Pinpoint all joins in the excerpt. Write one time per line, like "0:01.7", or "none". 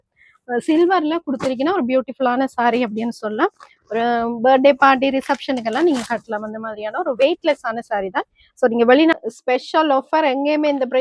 0:09.2